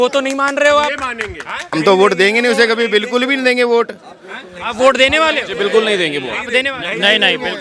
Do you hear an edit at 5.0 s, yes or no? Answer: no